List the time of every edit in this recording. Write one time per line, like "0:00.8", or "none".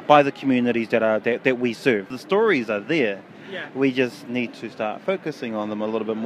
0:02.1